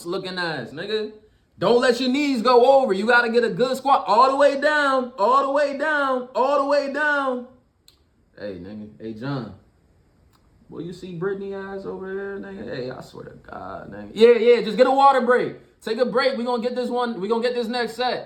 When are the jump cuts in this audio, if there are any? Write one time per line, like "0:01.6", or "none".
none